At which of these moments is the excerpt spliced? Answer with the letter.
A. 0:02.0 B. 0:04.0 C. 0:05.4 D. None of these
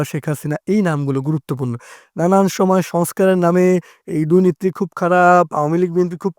A